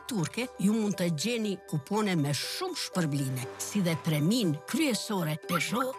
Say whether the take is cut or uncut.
uncut